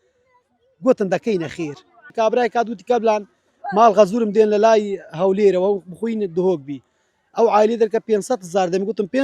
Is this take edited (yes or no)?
yes